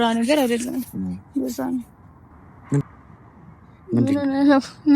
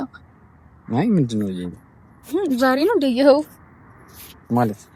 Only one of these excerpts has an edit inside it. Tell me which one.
first; 1 cut; at 2.8 s

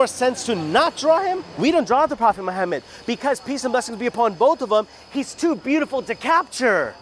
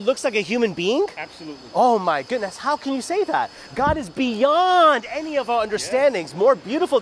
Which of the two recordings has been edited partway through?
first; 1 cut; at 1.5 s

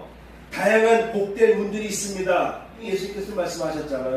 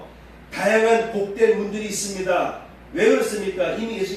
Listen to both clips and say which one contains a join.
first; 1 cut; at 2.8 s

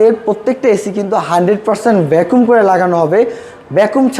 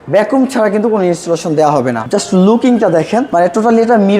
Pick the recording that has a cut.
second; 2 cuts; at 2.0 s, 3.3 s

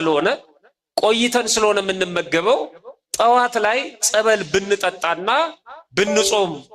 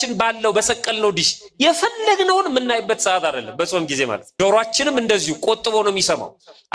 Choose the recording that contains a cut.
second; 1 cut; at 4.2 s

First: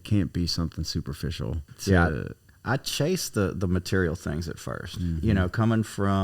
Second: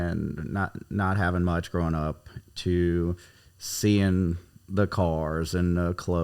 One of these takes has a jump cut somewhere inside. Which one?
first; 1 cut; at 1.6 s

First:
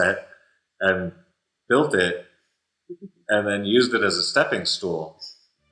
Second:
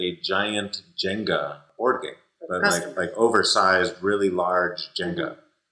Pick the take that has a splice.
second; 1 cut; at 1.7 s

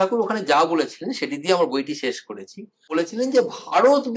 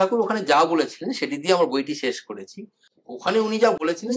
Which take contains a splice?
first; 1 cut; at 2.9 s

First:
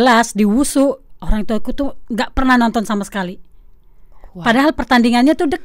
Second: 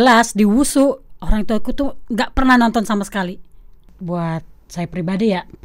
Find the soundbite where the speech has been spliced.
second; 1 cut; at 3.9 s

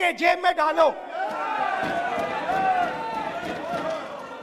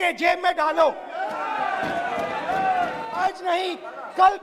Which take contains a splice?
second; 1 cut; at 3.2 s

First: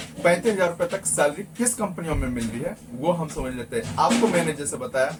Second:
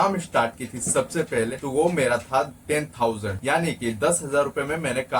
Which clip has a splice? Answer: second; 2 cuts; at 1.6 s, 3.3 s

